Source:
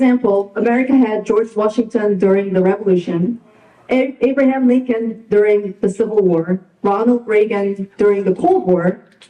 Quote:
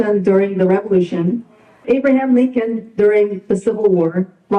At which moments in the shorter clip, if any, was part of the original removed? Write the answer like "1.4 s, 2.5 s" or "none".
1.8 s